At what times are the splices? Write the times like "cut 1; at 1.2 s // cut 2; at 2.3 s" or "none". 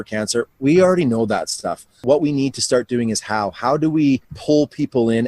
cut 1; at 2.0 s // cut 2; at 4.3 s